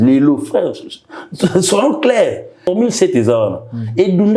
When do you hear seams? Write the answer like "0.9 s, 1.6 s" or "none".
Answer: 2.7 s